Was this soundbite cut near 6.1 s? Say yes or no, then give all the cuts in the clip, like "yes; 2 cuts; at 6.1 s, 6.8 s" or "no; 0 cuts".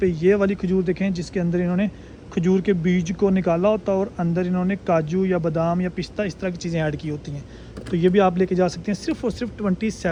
no; 0 cuts